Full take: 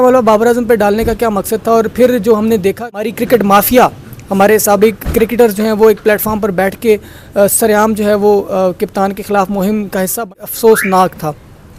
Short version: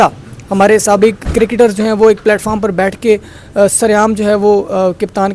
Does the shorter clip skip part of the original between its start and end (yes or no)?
no